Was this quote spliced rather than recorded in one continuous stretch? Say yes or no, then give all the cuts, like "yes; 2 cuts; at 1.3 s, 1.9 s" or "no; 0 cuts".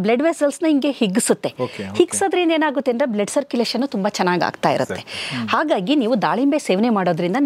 no; 0 cuts